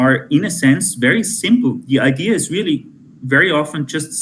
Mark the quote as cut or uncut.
uncut